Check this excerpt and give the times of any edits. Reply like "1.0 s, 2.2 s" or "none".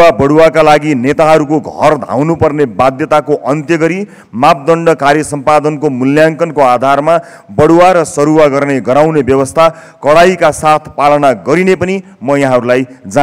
none